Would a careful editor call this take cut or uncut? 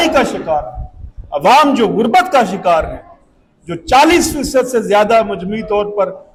uncut